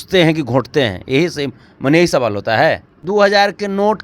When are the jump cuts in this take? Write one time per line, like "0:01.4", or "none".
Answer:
0:02.9